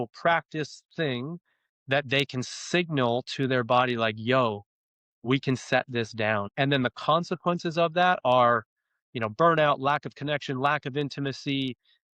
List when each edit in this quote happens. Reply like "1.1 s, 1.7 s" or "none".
6.5 s